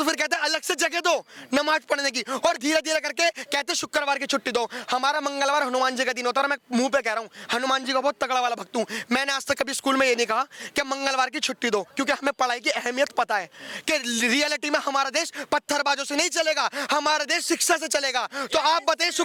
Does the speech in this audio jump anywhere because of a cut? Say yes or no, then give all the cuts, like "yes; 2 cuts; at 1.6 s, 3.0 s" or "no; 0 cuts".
no; 0 cuts